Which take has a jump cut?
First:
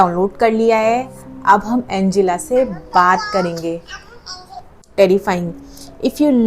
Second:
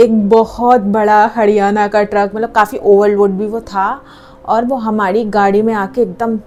first; 1 cut; at 4.9 s

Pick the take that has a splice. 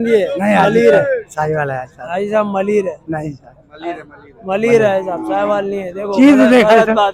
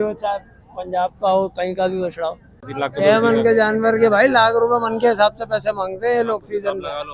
second; 1 cut; at 2.6 s

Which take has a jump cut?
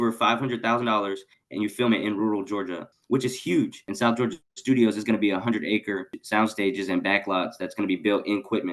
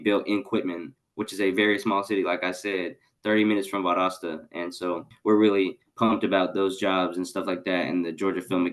first; 2 cuts; at 3.8 s, 6.2 s

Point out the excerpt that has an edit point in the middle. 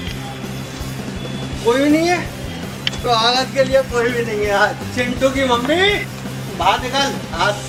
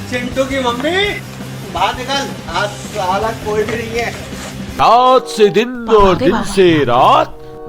second; 1 cut; at 4.6 s

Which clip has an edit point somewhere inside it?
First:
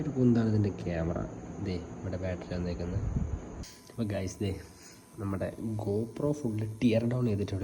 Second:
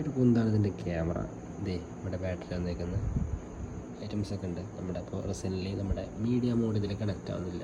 first; 1 cut; at 3.6 s

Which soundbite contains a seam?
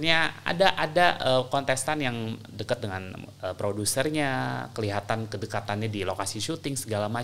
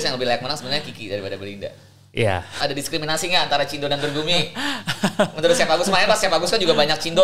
second; 1 cut; at 2.6 s

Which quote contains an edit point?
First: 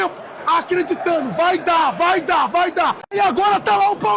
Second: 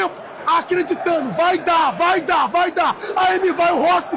first; 1 cut; at 3.0 s

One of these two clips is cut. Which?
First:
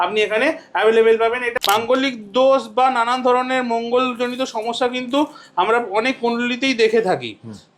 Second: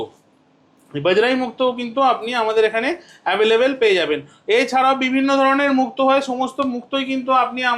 first; 1 cut; at 1.5 s

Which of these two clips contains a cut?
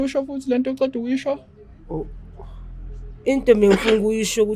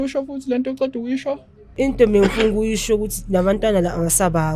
second; 1 cut; at 1.6 s

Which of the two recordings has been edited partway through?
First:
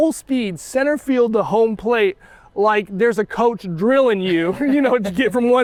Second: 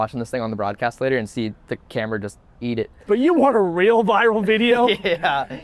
second; 1 cut; at 3.0 s

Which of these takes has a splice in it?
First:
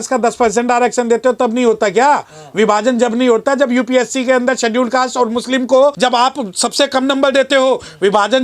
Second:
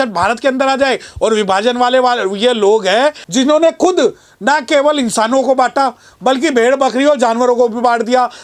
first; 1 cut; at 6.0 s

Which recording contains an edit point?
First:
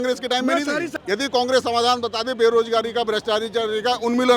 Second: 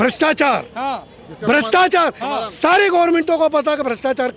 first; 1 cut; at 0.9 s

